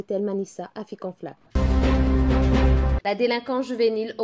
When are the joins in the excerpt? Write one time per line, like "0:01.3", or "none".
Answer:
0:01.5
0:02.9